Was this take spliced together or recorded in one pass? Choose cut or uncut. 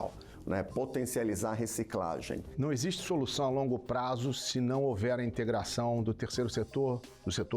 cut